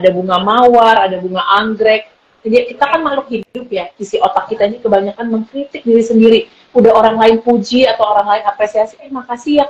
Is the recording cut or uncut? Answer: cut